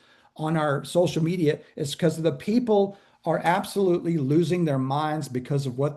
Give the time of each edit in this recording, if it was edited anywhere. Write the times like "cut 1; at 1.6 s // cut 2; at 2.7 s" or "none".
none